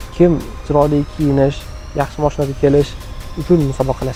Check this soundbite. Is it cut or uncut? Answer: uncut